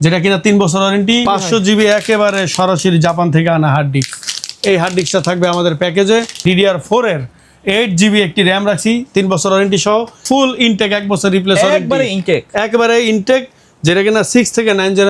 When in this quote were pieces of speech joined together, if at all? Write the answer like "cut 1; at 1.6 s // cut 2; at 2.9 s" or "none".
cut 1; at 1.3 s // cut 2; at 6.4 s // cut 3; at 10.2 s